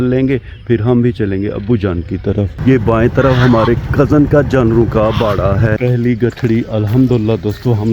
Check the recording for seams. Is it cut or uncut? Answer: cut